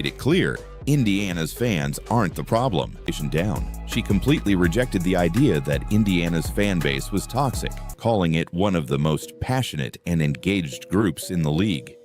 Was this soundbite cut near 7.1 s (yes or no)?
no